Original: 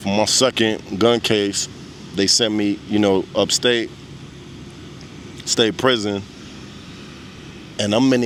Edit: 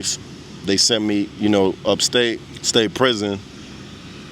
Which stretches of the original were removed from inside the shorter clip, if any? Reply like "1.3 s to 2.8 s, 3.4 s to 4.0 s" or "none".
4.0 s to 5.4 s